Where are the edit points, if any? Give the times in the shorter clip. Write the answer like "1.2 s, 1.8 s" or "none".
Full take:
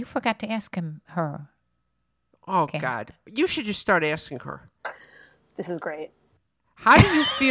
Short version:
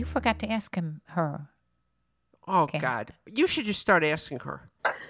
none